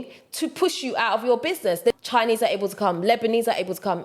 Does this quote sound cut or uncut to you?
cut